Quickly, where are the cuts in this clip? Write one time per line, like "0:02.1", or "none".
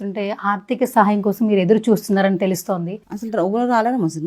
0:03.0